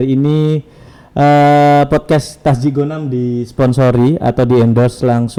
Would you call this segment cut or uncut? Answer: uncut